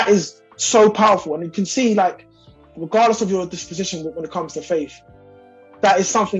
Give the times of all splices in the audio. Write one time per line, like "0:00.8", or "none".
none